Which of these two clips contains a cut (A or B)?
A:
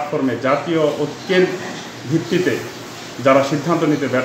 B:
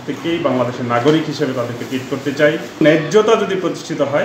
B